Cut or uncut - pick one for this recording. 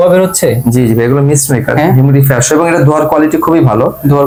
uncut